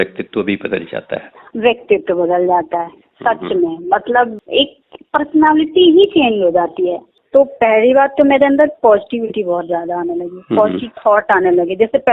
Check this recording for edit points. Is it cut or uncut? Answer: cut